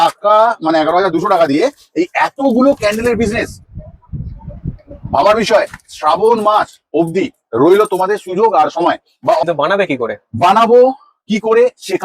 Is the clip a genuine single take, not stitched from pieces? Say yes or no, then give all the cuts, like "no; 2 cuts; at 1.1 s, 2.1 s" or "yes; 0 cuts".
no; 1 cut; at 9.4 s